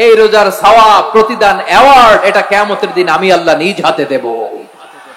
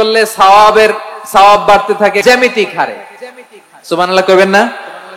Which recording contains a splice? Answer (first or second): second